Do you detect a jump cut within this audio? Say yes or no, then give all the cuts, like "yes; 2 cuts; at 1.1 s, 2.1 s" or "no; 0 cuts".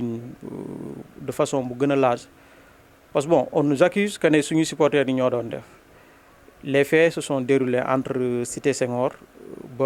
no; 0 cuts